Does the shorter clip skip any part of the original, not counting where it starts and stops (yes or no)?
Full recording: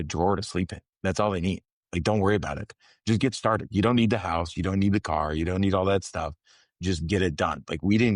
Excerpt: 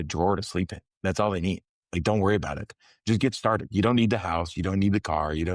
no